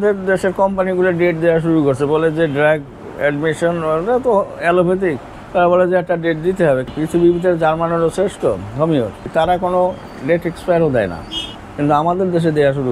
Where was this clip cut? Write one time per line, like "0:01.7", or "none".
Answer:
0:06.9
0:09.2